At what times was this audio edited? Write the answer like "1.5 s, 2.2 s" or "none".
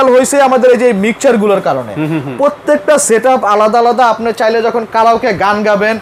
none